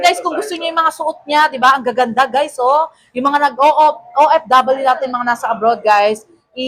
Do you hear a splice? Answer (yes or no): no